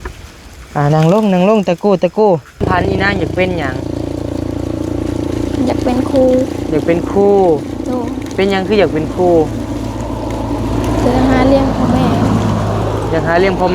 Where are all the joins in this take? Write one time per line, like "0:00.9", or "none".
0:02.6